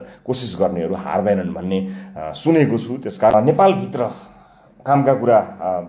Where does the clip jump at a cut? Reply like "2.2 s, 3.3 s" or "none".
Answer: 3.3 s